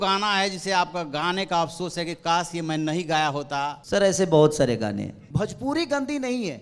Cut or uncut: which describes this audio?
cut